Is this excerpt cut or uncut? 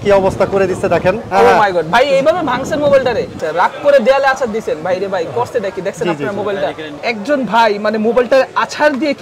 cut